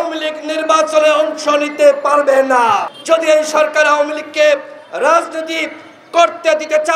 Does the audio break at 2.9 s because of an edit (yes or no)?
yes